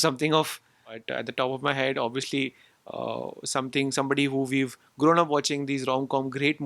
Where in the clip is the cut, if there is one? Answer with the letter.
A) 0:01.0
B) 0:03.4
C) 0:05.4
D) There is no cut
A